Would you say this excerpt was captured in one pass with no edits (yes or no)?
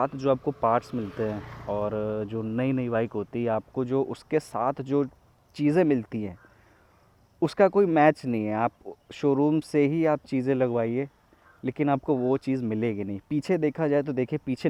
yes